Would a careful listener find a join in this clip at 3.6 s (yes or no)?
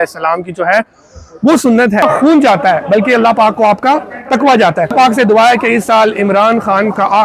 no